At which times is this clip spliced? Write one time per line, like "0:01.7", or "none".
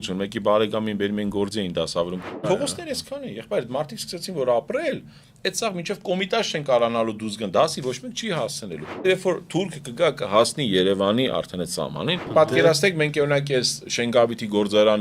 0:02.4
0:09.0
0:12.2

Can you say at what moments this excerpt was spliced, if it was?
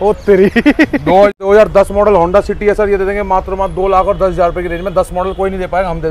0:01.3

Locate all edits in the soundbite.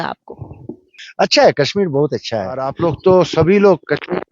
0:00.9
0:02.8

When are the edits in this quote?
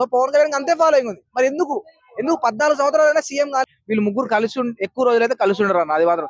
0:03.6

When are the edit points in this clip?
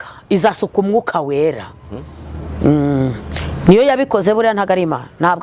none

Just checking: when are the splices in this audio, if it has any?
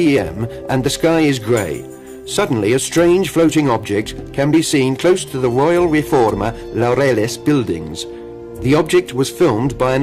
none

